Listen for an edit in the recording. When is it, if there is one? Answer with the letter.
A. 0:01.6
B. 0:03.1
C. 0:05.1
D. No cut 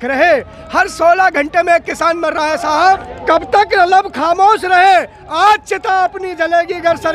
B